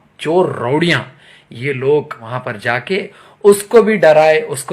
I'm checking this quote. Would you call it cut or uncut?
cut